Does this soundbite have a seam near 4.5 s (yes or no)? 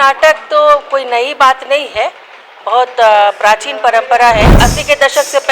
yes